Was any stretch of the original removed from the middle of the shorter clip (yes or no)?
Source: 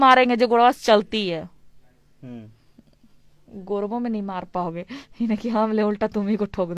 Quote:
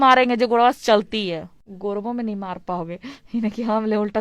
yes